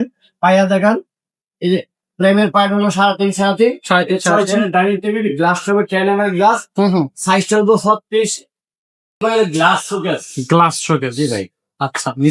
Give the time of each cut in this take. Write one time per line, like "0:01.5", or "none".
0:09.2